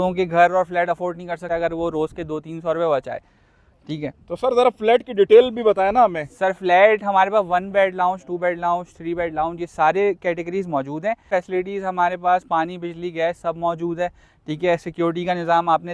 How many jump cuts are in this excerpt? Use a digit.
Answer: 2